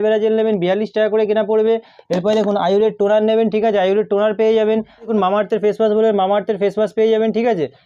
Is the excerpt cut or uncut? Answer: uncut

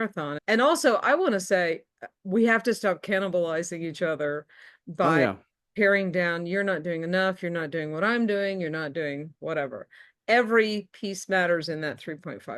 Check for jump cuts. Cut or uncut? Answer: uncut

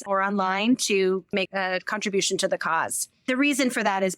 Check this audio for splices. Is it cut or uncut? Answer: cut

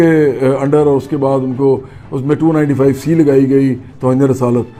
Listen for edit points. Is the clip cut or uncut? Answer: uncut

